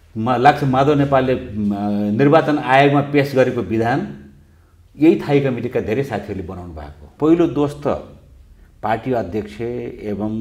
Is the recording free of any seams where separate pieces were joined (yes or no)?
no